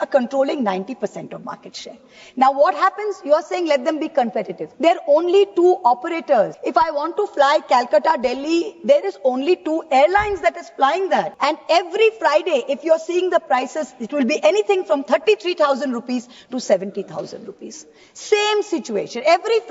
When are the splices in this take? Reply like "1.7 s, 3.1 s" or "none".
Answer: 4.6 s, 6.6 s, 11.3 s